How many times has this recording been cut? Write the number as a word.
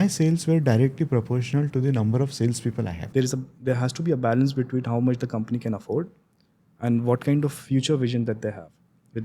one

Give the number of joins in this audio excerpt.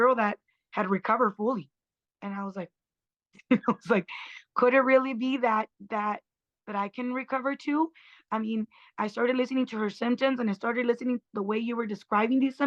zero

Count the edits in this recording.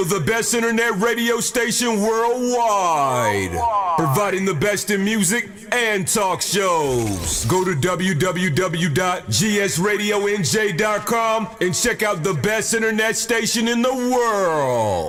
zero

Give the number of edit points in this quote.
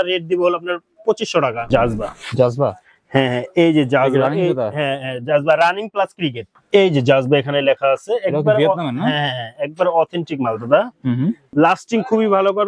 three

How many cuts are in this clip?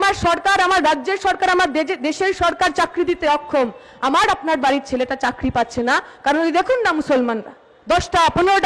zero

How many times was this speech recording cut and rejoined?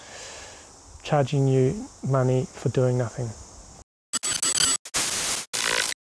one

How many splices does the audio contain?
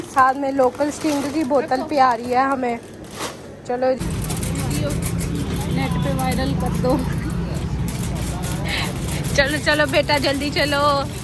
two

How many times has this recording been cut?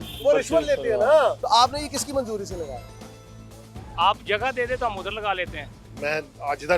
two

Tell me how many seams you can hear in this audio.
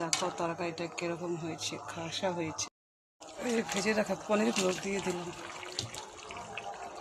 one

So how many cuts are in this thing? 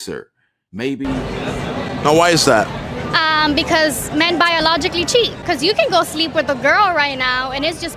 one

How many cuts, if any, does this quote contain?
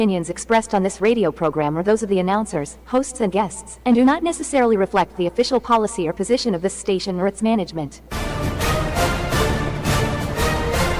zero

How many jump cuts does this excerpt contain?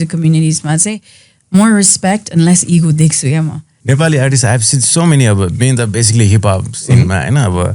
one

